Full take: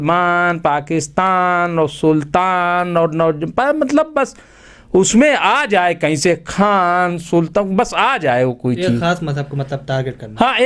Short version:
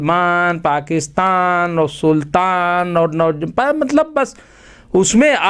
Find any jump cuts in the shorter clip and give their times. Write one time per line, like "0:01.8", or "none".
none